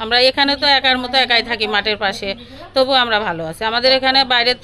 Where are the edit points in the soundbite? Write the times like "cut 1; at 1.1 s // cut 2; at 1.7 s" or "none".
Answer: none